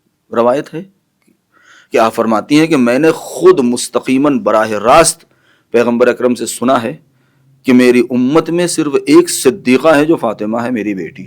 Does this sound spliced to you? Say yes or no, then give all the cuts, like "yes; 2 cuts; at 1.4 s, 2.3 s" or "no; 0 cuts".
no; 0 cuts